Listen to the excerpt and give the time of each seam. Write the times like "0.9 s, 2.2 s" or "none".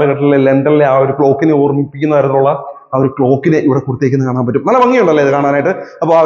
none